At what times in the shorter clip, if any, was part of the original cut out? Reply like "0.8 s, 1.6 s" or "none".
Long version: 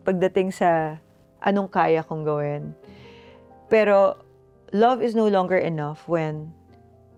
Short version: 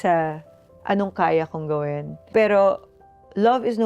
2.1 s

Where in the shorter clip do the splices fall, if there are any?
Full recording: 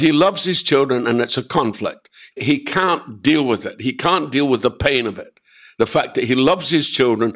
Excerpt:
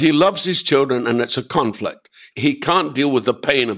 2.5 s

